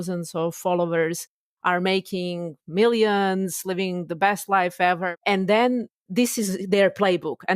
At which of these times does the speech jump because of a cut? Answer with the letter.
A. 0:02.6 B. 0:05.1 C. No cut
B